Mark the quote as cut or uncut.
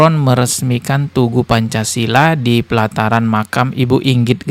uncut